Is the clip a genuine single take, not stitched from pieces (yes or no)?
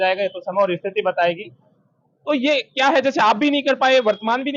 yes